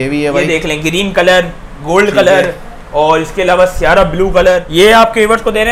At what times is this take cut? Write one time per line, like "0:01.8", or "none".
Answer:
0:04.6